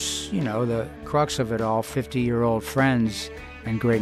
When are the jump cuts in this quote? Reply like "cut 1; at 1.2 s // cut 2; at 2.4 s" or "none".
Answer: cut 1; at 1.0 s